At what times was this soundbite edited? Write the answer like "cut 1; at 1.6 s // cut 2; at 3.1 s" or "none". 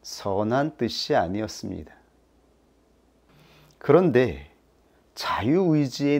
cut 1; at 3.3 s